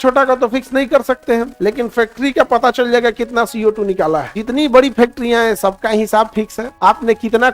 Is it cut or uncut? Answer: cut